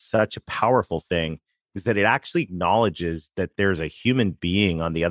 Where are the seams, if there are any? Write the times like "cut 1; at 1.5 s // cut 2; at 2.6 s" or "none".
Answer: none